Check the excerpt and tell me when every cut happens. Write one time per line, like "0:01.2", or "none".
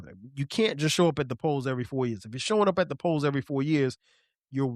none